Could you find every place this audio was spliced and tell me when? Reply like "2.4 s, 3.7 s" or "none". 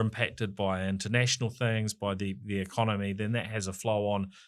none